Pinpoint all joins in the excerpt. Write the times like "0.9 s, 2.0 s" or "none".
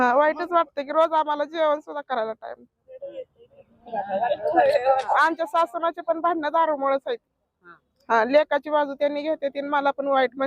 5.1 s